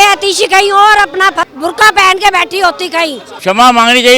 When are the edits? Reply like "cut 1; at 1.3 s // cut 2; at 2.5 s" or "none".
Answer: cut 1; at 1.5 s // cut 2; at 3.3 s